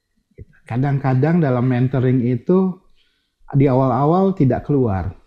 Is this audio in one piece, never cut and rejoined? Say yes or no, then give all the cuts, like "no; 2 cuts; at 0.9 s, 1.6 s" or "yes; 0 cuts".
yes; 0 cuts